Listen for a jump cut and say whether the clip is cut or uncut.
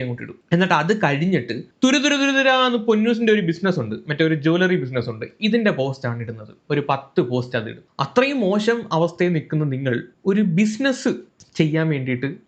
cut